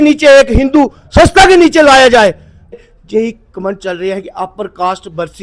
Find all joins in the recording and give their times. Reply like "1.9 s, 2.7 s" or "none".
2.5 s